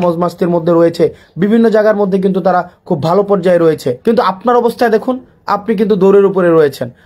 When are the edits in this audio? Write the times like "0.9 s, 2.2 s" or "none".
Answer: 4.0 s

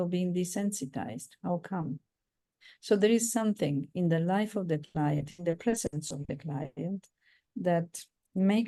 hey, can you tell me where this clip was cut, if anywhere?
none

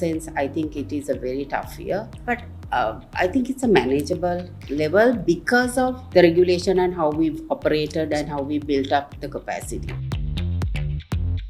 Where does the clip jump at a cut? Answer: 9.9 s

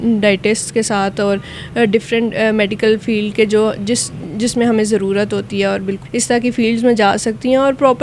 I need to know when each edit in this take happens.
6.0 s

